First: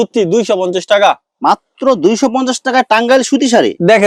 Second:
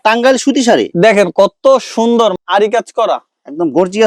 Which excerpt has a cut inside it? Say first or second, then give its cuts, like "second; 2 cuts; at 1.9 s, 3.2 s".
second; 1 cut; at 2.4 s